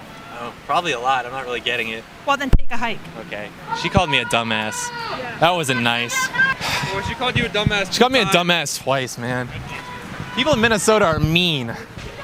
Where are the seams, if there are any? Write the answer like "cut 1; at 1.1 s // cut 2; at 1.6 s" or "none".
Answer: none